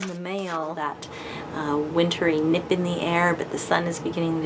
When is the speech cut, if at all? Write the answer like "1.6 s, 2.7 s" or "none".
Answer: 1.0 s